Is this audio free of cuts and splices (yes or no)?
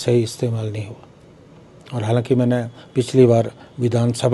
yes